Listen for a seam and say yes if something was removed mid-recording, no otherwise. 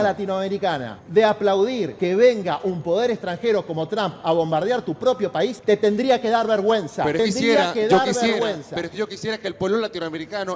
yes